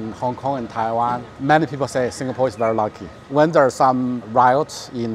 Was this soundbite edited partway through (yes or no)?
yes